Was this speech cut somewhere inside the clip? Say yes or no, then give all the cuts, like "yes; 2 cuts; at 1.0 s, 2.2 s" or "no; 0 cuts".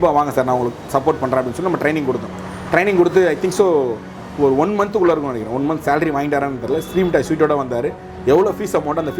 no; 0 cuts